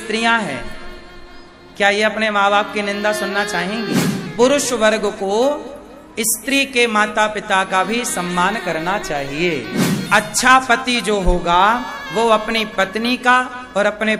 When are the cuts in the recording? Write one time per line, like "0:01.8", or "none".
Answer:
0:04.3
0:10.0